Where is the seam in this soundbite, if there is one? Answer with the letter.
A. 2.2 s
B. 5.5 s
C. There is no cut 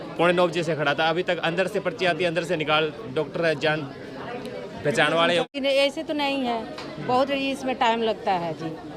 B